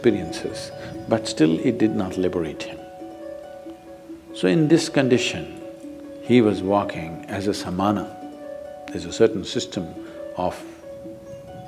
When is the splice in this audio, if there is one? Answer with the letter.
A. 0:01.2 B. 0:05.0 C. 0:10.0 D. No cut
D